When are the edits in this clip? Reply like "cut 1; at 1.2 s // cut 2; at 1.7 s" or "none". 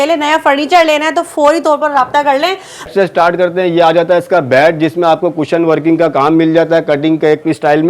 cut 1; at 2.9 s